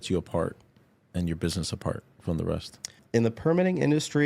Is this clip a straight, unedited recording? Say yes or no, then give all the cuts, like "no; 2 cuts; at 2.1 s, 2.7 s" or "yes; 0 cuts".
no; 1 cut; at 3.0 s